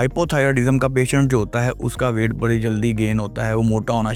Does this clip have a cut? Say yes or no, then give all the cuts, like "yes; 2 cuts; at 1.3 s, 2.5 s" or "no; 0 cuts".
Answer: no; 0 cuts